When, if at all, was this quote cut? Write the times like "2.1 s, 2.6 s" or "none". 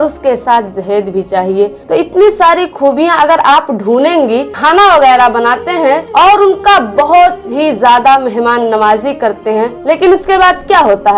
4.5 s

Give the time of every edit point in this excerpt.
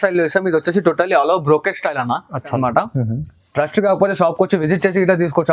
2.5 s

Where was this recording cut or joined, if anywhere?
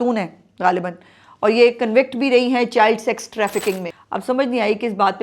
3.9 s

